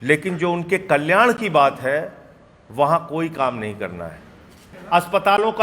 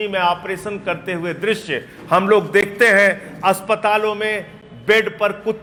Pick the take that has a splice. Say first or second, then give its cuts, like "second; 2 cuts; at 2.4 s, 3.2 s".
first; 1 cut; at 4.7 s